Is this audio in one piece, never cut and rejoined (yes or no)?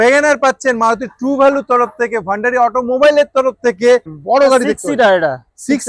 no